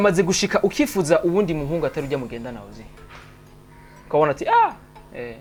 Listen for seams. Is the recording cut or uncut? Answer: uncut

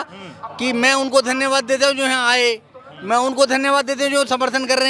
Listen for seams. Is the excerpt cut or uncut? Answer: uncut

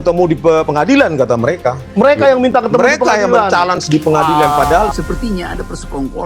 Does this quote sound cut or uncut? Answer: cut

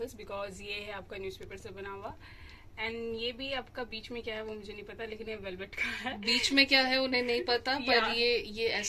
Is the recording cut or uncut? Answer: uncut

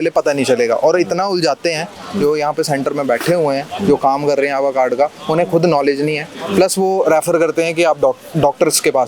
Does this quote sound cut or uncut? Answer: uncut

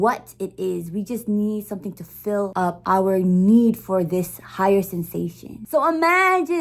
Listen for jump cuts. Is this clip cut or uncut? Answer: cut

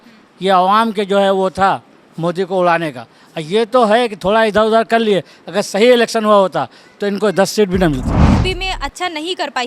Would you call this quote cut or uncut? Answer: cut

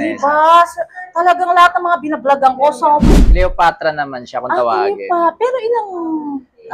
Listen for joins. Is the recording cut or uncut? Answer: cut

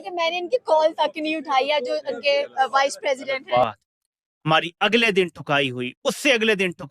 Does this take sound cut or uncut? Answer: cut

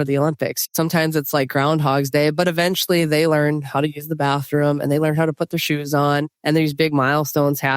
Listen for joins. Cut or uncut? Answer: cut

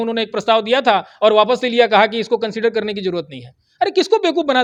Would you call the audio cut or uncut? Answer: uncut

